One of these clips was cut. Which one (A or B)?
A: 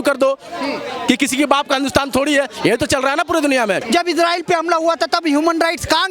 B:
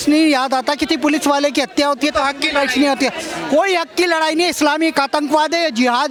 A